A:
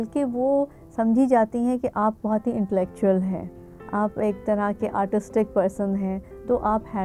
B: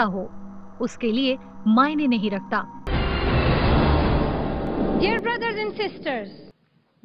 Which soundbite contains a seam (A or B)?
B